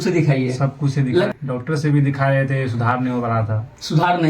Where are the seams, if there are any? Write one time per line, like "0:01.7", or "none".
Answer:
0:01.3